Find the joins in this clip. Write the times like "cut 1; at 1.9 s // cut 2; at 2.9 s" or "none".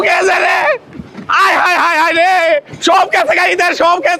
none